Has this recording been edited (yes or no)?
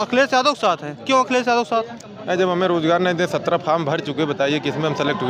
no